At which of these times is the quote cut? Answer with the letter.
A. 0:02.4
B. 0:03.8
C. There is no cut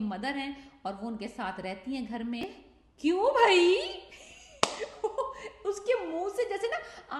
A